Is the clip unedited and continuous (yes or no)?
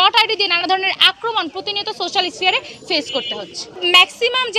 yes